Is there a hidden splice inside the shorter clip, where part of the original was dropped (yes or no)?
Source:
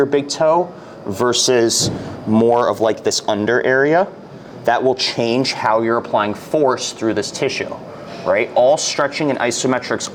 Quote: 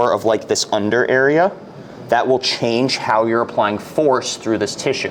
no